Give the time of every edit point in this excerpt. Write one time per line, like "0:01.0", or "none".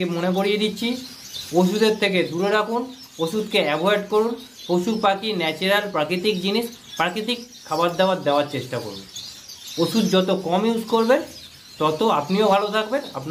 none